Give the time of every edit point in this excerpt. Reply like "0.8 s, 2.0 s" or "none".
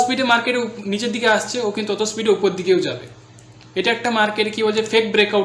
none